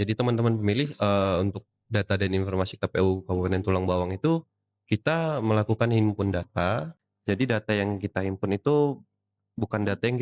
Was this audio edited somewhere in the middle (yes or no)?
yes